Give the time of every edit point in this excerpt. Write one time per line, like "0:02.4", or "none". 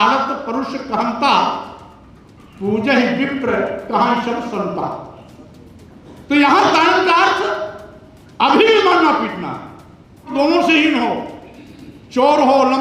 0:10.3